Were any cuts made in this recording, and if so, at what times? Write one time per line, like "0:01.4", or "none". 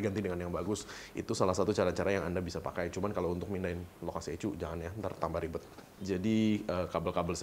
0:05.8